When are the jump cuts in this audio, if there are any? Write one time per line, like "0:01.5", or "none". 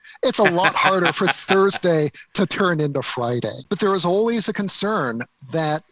0:03.6